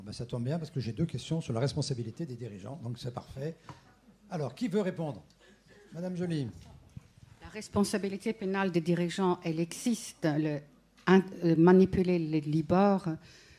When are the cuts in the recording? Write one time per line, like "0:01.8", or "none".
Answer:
0:01.3